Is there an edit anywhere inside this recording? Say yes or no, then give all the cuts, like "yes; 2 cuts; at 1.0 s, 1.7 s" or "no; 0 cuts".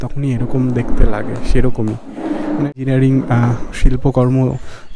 yes; 1 cut; at 2.7 s